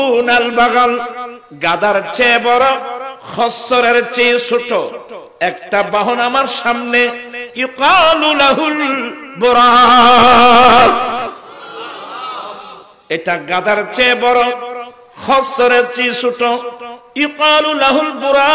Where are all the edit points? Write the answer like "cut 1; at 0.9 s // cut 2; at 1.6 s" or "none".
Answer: cut 1; at 12.8 s

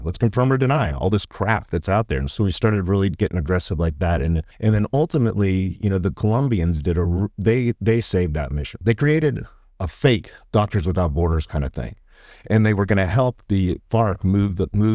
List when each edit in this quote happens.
cut 1; at 4.5 s // cut 2; at 8.8 s

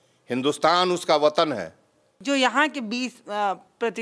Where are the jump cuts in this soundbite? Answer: cut 1; at 2.1 s

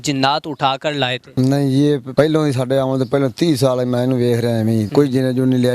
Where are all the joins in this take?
cut 1; at 1.2 s // cut 2; at 2.1 s // cut 3; at 4.9 s

